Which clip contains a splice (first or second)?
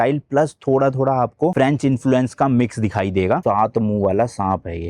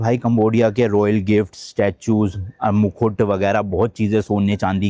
first